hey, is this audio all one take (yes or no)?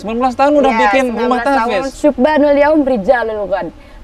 no